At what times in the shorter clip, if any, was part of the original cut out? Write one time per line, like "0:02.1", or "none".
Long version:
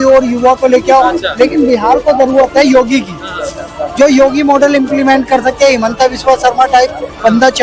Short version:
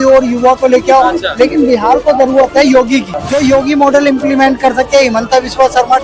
0:03.2